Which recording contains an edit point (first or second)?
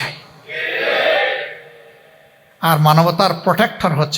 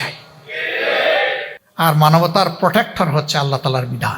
second